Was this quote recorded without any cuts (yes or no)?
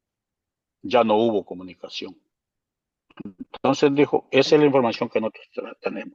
yes